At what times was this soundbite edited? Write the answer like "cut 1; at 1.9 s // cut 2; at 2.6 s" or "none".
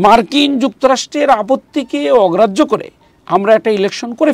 none